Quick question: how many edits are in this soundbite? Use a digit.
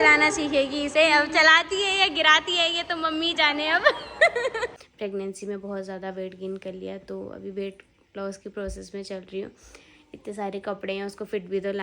1